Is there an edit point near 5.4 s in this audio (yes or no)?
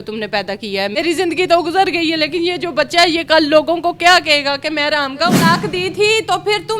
yes